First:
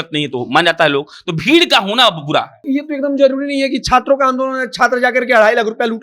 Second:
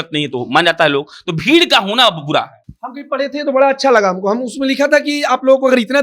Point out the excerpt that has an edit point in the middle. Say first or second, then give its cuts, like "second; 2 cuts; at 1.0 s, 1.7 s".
first; 1 cut; at 2.6 s